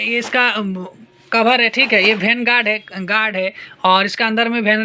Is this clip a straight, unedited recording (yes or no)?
yes